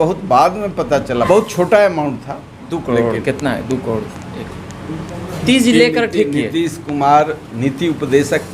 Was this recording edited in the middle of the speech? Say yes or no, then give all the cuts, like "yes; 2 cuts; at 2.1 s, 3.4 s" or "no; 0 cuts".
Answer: yes; 2 cuts; at 1.2 s, 5.4 s